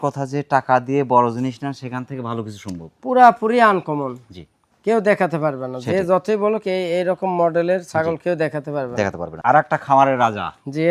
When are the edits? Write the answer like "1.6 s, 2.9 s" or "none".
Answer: 9.3 s